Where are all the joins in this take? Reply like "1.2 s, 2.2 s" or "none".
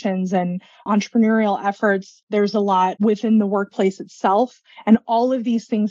0.9 s, 2.2 s, 3.0 s